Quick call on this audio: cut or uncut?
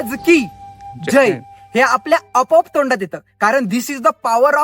uncut